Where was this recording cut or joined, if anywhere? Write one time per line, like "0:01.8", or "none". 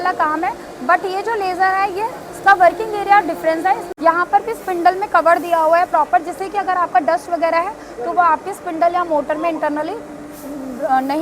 0:03.9